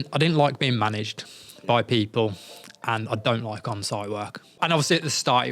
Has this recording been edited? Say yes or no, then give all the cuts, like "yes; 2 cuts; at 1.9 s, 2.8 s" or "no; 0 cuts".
yes; 1 cut; at 4.6 s